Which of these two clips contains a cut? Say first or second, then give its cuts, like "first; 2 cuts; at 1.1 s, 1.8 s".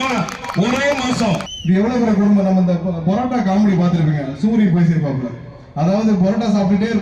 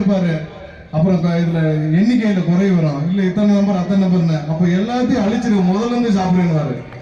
first; 1 cut; at 1.5 s